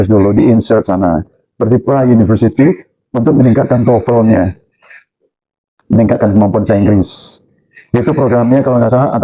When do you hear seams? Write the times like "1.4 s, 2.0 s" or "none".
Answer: none

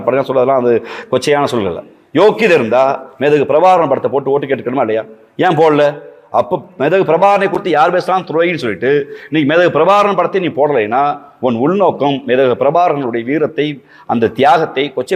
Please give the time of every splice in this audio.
none

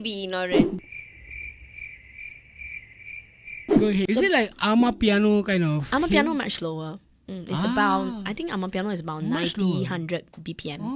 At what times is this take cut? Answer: 4.1 s

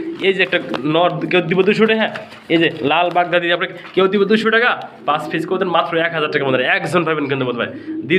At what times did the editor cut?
none

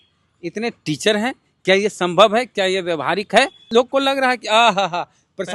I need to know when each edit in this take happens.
3.7 s

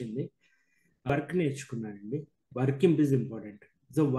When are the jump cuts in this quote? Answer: 1.1 s

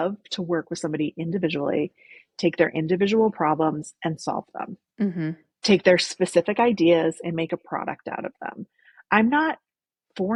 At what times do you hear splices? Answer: none

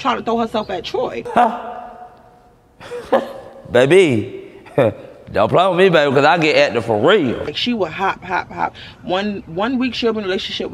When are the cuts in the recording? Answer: 1.2 s, 7.6 s

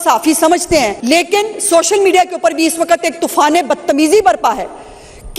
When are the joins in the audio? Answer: 1.0 s

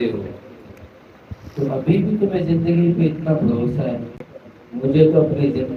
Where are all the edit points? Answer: none

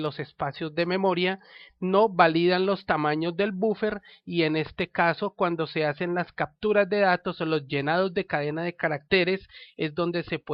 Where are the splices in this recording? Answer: 1.5 s

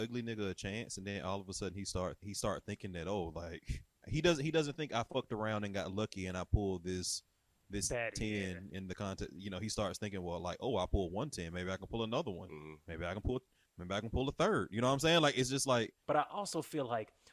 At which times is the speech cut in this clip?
2.2 s, 4.1 s, 16.0 s

